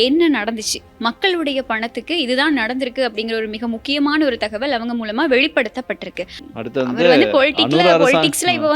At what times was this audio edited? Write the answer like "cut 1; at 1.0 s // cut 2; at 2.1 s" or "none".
cut 1; at 6.4 s